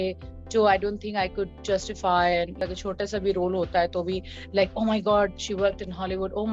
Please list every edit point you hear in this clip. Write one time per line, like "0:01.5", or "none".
0:02.6

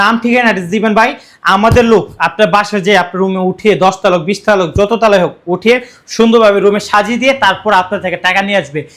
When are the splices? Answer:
none

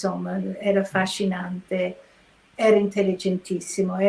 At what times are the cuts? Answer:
none

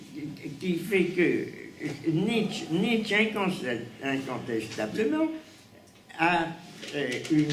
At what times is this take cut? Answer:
none

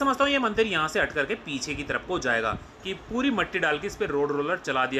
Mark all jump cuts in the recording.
0:02.7

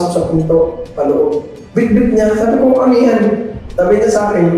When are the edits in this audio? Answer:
0:01.6
0:03.6

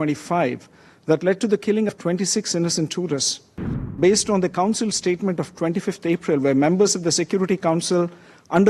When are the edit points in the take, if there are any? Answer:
0:04.0

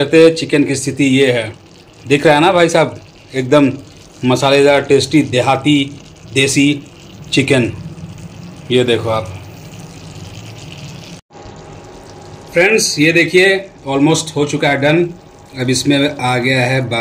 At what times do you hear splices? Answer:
none

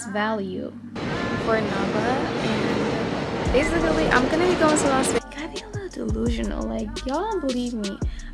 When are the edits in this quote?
0:01.0
0:05.2

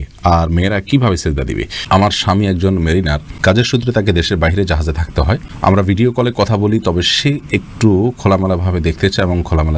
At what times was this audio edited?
0:01.8
0:03.2
0:05.5

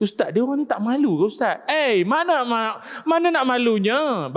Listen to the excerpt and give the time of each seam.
none

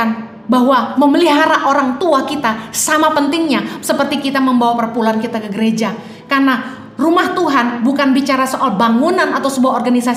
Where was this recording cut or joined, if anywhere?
none

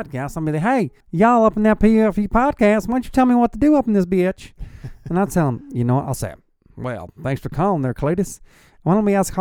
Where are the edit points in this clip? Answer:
0:01.0

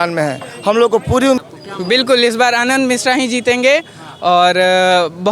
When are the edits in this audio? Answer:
0:01.4

